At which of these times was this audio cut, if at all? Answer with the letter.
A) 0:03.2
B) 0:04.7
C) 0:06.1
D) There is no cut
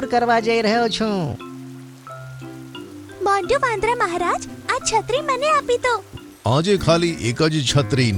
C